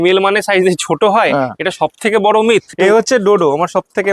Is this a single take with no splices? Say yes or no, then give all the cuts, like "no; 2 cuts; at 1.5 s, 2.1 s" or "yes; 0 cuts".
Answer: no; 1 cut; at 2.7 s